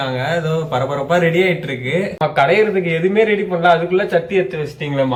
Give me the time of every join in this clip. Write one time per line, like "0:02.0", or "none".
none